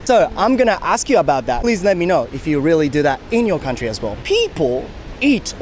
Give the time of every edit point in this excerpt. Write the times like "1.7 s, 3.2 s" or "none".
1.6 s, 4.1 s